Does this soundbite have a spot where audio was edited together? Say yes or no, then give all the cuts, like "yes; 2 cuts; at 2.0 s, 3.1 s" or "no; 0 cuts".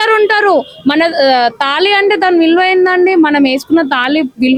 no; 0 cuts